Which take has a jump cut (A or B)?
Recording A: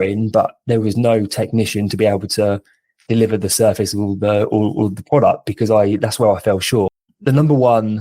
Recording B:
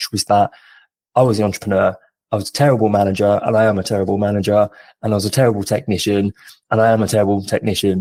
A